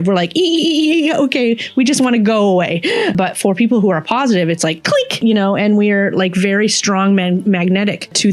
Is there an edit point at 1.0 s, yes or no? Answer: no